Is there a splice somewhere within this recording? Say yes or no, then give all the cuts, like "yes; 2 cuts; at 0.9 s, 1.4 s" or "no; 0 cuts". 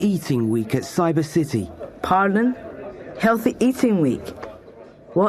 no; 0 cuts